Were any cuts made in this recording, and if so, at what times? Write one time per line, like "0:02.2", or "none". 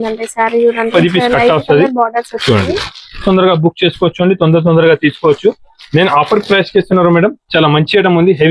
0:00.9
0:03.2